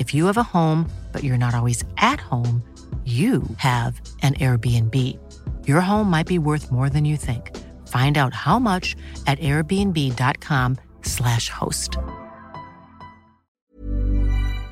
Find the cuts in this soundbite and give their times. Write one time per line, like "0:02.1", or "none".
0:13.7